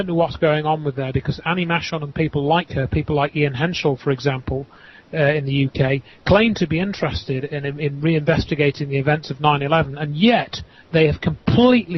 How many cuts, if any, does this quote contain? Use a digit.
1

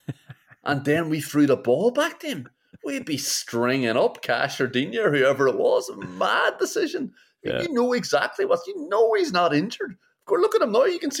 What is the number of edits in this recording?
0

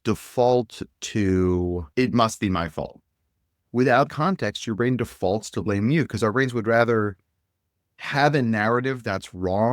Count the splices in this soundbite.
1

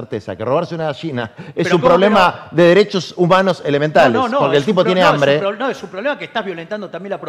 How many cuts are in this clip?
0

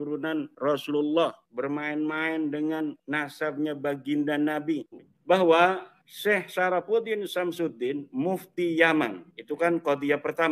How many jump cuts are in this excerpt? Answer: 1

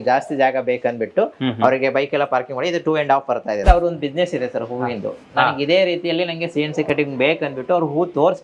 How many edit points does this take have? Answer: 1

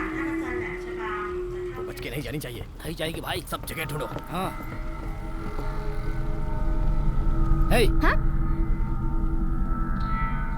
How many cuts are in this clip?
1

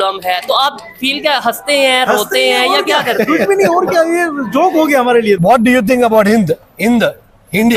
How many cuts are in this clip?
1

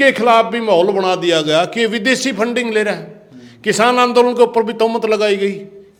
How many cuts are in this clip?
0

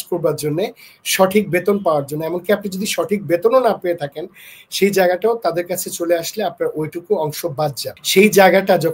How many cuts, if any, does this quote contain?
1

